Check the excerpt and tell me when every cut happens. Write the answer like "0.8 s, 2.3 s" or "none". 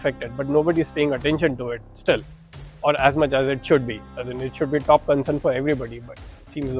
none